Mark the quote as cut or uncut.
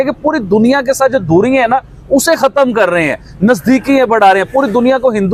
uncut